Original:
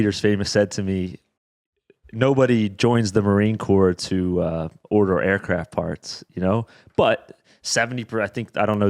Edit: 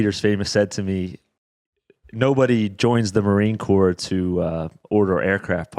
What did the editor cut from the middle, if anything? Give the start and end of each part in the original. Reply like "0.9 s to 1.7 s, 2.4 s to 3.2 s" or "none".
none